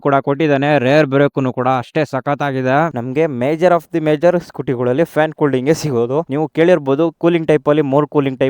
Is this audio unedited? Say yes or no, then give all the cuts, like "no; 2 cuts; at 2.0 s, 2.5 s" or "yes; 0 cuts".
no; 1 cut; at 2.9 s